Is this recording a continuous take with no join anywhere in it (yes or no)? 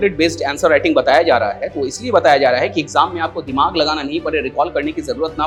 yes